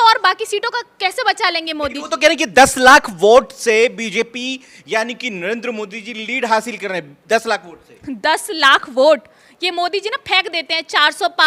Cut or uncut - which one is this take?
uncut